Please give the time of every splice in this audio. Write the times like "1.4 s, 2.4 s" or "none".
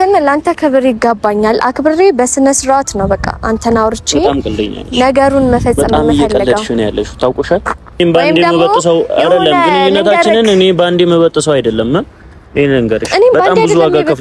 8.0 s